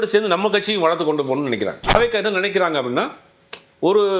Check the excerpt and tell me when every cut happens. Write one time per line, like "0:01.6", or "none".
0:01.9